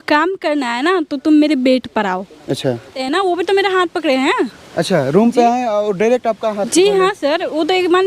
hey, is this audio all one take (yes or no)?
no